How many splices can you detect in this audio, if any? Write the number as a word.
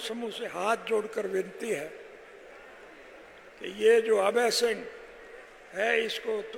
zero